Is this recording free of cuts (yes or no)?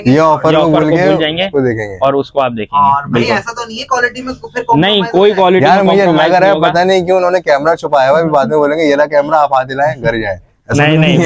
yes